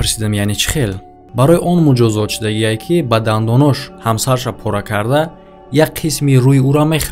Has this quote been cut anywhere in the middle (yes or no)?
yes